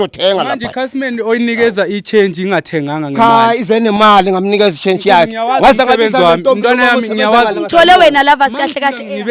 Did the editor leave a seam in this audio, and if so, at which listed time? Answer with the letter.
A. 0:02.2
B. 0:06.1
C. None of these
C